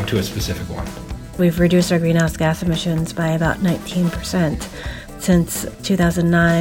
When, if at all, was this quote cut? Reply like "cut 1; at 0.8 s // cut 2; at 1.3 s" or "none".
cut 1; at 1.3 s